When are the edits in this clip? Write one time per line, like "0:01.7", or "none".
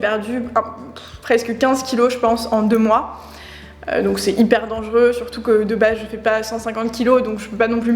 none